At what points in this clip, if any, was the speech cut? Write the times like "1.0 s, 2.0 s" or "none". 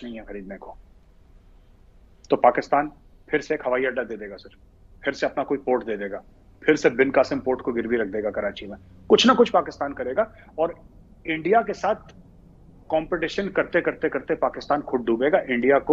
none